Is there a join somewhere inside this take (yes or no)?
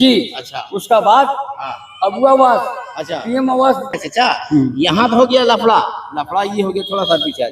yes